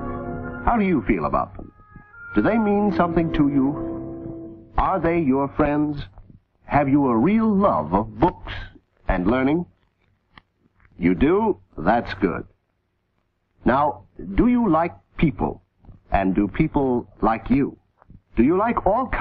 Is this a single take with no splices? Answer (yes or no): no